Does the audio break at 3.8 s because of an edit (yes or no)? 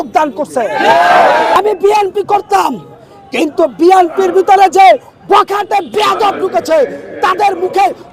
no